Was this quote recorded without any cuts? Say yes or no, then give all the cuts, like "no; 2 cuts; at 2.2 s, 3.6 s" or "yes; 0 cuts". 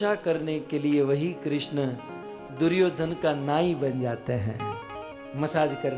yes; 0 cuts